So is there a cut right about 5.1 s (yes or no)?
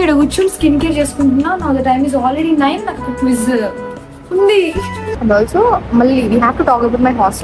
yes